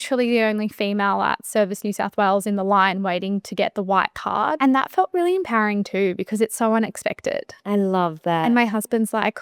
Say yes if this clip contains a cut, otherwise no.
yes